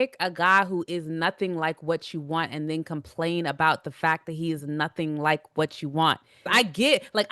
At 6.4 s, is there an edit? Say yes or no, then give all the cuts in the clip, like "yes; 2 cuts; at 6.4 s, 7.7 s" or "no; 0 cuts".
yes; 1 cut; at 6.4 s